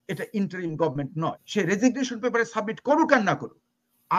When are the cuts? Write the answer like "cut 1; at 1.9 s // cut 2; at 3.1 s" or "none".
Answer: cut 1; at 1.4 s